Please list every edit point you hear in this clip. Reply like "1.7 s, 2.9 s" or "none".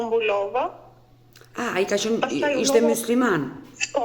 none